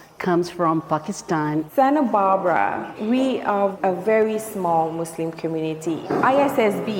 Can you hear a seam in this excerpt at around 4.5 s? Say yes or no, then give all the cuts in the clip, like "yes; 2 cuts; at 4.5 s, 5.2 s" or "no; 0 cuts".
no; 1 cut; at 1.7 s